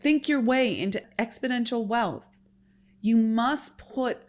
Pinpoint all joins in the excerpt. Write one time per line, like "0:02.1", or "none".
0:01.0